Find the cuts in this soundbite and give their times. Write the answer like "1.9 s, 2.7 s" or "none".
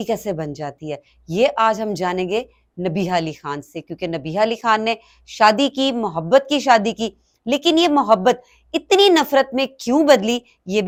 none